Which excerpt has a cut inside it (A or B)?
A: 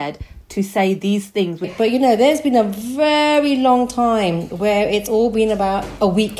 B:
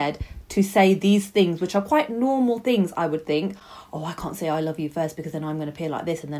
A